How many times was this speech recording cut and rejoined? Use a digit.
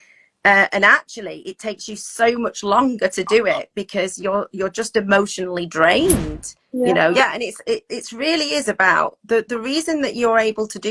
1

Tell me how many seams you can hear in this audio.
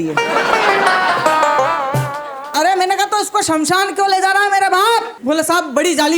1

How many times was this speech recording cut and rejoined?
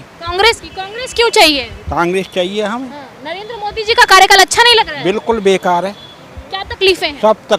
0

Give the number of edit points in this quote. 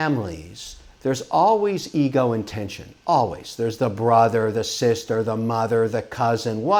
0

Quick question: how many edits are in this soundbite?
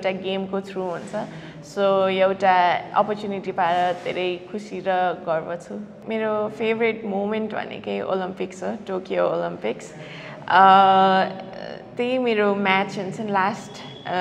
0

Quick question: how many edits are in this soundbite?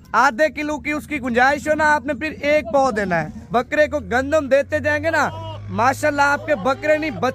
1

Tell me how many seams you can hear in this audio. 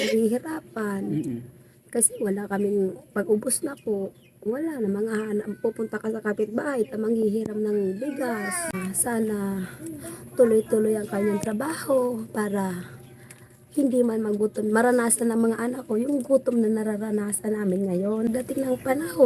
2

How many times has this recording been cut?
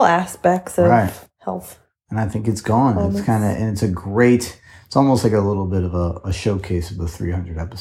1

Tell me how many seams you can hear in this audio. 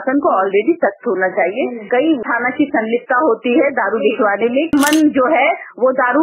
2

